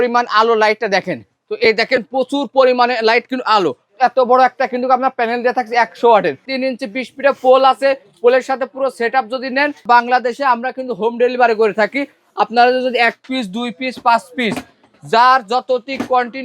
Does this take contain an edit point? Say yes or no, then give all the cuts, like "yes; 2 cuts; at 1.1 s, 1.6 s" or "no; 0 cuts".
yes; 3 cuts; at 3.9 s, 6.5 s, 9.8 s